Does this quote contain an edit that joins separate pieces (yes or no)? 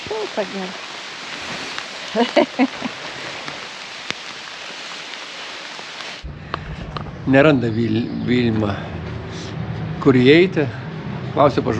yes